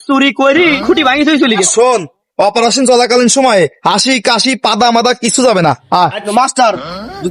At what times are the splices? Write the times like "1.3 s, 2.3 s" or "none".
1.7 s, 6.2 s